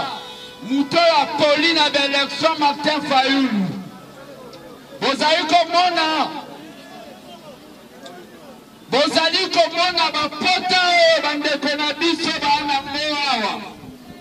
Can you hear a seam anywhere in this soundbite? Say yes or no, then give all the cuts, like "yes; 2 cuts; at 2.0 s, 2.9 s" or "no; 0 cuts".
no; 0 cuts